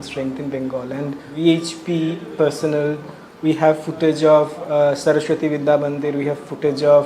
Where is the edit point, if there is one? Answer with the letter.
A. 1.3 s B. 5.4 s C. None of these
A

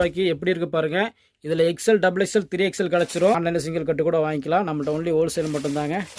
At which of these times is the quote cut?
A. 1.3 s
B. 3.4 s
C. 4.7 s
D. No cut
B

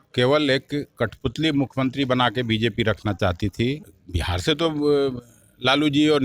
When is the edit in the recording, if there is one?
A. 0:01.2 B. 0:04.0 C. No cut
B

